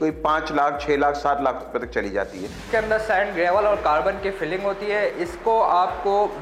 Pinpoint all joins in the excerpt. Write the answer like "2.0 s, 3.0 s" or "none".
2.6 s